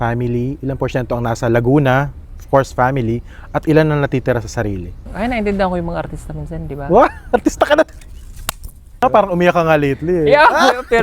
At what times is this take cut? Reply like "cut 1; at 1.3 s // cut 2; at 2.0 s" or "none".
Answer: cut 1; at 5.1 s // cut 2; at 9.0 s